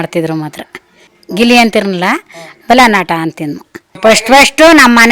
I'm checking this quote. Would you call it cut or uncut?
cut